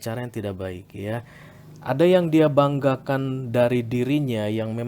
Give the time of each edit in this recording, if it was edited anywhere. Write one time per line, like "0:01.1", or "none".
none